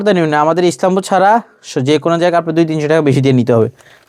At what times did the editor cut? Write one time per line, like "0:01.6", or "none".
none